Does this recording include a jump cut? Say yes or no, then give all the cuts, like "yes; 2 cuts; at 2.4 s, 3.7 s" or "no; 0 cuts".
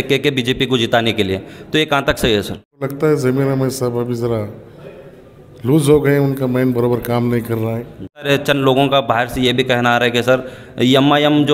yes; 2 cuts; at 2.9 s, 8.3 s